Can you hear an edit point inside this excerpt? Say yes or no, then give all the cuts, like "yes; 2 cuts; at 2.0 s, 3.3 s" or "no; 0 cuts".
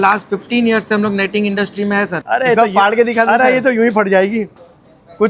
yes; 1 cut; at 2.2 s